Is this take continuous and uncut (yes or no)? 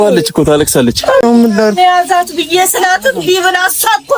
no